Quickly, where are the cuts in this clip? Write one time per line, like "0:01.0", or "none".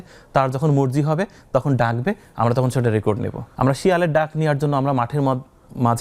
0:03.4